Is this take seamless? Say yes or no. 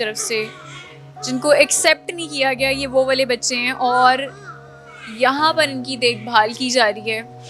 yes